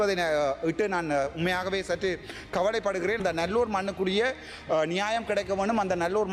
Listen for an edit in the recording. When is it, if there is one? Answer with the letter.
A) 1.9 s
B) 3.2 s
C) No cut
B